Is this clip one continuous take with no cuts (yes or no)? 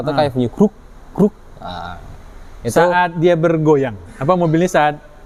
yes